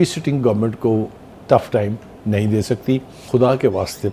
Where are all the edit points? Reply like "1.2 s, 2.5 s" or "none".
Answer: 3.2 s